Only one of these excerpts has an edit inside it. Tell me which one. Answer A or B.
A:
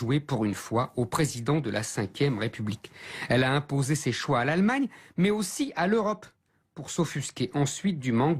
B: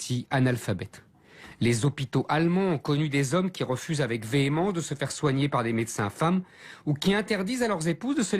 A